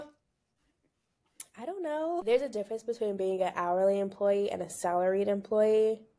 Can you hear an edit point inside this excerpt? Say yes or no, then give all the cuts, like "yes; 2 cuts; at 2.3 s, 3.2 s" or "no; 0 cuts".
yes; 1 cut; at 2.2 s